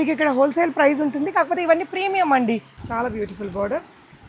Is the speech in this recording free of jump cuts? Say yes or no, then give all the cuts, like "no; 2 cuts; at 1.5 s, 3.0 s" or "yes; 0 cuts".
no; 1 cut; at 2.7 s